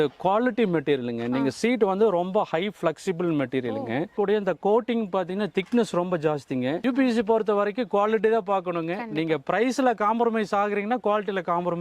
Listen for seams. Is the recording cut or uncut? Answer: cut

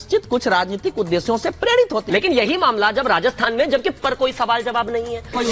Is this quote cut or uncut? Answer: uncut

